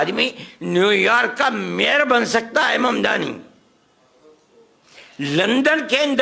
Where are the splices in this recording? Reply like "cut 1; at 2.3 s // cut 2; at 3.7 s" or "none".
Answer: none